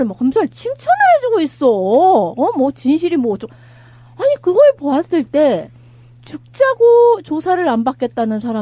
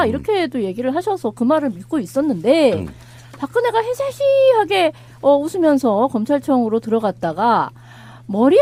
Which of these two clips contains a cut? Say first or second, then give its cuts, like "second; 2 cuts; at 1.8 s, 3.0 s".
first; 1 cut; at 3.1 s